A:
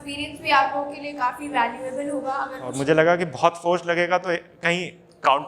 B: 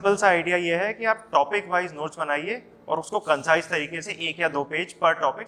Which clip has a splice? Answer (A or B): A